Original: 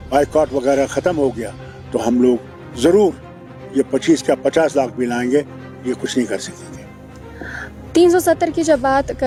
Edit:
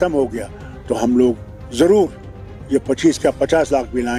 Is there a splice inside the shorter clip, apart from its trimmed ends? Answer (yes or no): no